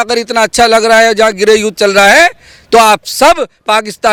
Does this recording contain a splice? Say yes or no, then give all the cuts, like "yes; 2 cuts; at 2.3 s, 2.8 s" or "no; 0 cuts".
no; 0 cuts